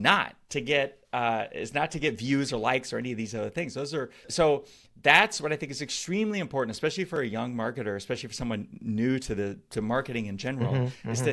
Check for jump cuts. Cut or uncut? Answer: cut